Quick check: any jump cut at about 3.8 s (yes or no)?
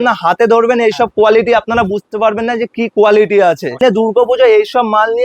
yes